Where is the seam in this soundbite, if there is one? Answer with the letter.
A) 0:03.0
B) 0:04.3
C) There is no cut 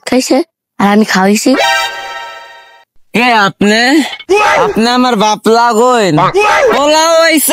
A